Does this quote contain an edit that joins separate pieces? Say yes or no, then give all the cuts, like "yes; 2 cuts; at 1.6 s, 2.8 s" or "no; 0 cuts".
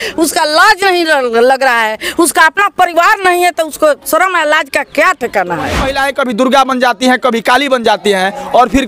yes; 1 cut; at 5.9 s